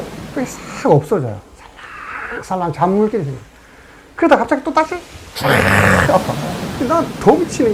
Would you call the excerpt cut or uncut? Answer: uncut